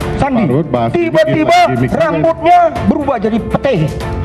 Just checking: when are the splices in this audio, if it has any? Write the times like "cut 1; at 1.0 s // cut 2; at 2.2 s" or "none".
none